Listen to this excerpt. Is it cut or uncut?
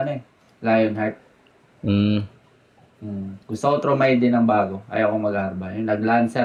uncut